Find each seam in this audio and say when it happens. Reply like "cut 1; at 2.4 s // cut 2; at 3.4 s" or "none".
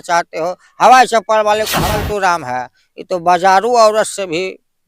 cut 1; at 1.9 s